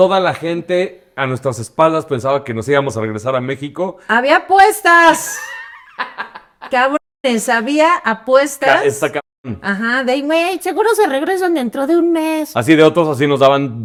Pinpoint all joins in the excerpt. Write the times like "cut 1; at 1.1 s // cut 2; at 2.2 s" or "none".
none